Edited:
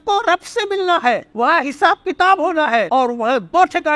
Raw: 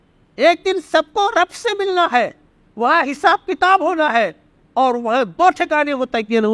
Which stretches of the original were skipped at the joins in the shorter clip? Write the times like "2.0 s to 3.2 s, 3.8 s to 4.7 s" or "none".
2.4 s to 2.7 s, 4.3 s to 4.7 s